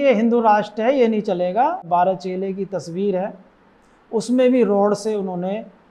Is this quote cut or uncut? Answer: cut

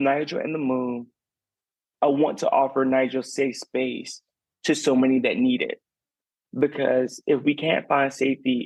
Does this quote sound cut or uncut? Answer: uncut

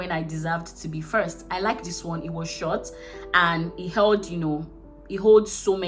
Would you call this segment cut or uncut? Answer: uncut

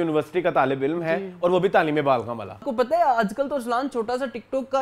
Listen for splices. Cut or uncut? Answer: cut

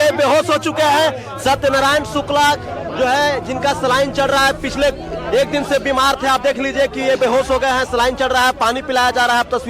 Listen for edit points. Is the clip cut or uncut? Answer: uncut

